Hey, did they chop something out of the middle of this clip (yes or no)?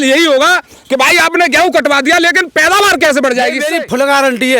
yes